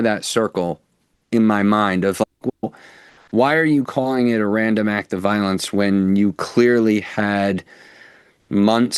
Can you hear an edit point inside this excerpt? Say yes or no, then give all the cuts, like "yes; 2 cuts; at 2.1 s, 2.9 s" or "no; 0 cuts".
no; 0 cuts